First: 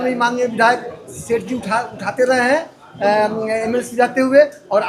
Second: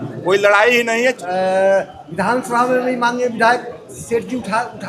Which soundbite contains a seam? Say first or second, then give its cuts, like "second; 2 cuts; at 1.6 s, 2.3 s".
second; 1 cut; at 1.2 s